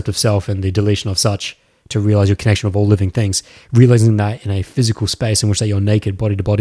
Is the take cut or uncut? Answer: uncut